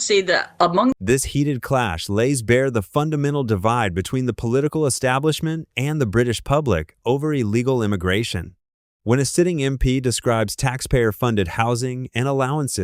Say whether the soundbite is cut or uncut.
cut